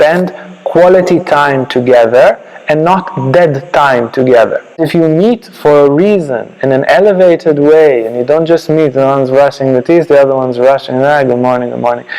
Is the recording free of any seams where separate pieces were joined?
no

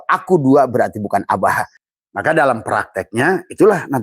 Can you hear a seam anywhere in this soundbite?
yes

